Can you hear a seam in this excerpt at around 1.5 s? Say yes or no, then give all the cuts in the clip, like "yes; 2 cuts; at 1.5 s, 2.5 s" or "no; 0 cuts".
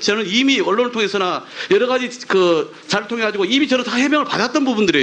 yes; 1 cut; at 1.5 s